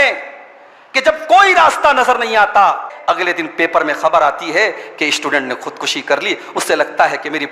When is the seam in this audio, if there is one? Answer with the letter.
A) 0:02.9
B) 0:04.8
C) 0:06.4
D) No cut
A